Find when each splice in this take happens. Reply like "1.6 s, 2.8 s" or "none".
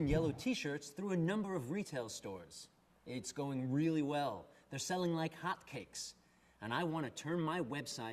5.2 s